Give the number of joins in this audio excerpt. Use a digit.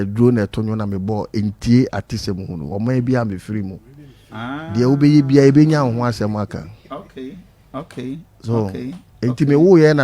0